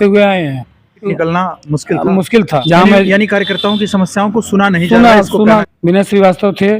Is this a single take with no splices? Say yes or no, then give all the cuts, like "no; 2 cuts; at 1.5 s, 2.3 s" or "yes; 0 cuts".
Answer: no; 3 cuts; at 1.1 s, 2.6 s, 5.7 s